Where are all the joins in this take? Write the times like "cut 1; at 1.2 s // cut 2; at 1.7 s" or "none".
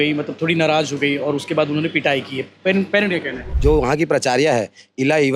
cut 1; at 3.7 s